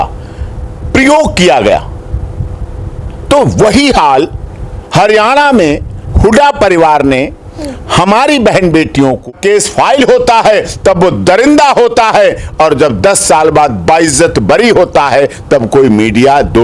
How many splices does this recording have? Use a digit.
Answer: 1